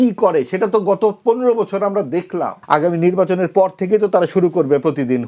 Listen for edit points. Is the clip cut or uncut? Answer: cut